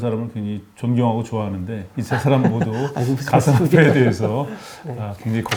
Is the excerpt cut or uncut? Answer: uncut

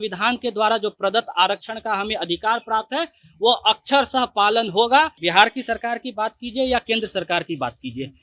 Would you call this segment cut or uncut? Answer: cut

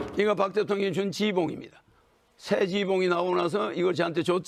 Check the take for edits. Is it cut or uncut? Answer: uncut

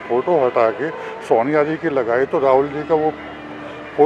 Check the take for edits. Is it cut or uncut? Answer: uncut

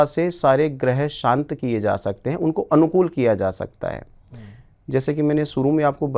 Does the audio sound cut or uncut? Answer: uncut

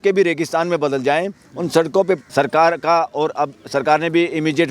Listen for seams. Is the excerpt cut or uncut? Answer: cut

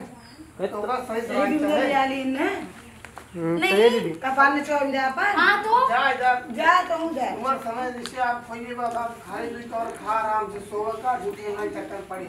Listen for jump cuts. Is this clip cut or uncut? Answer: uncut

